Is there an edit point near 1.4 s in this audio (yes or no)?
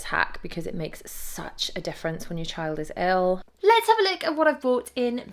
no